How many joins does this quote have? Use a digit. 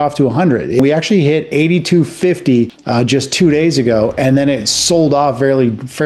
2